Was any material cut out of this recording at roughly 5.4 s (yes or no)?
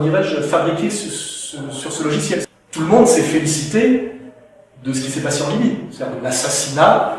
no